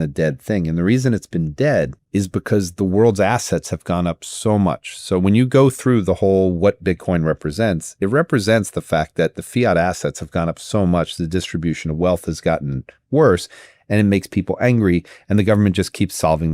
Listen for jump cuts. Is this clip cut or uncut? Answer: uncut